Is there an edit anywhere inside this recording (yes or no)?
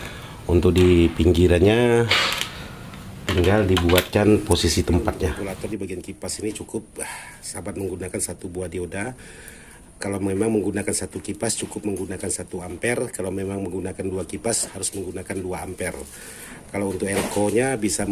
yes